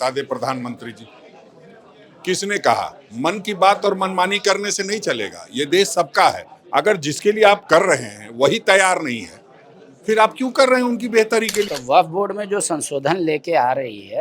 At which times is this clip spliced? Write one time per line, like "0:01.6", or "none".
0:11.7